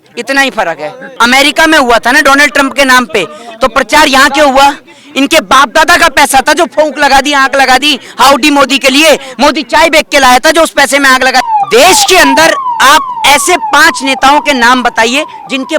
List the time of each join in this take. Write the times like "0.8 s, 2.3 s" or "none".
1.1 s, 11.5 s